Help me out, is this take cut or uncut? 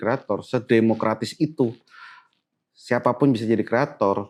uncut